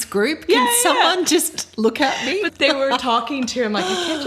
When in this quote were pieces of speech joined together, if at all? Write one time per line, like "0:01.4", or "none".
none